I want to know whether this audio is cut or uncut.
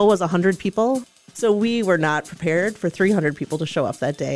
cut